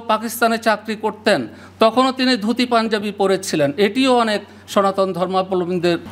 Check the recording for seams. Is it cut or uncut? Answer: uncut